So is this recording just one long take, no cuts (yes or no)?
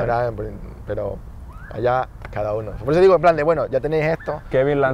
yes